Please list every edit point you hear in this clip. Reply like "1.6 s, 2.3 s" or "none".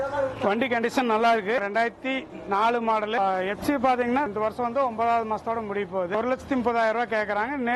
1.6 s, 4.3 s, 6.1 s